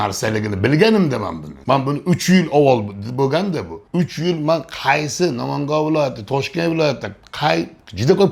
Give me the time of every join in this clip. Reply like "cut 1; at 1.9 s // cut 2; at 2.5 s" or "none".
none